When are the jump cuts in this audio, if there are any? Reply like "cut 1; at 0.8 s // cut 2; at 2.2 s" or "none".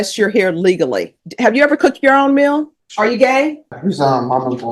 cut 1; at 1.2 s // cut 2; at 2.8 s // cut 3; at 3.8 s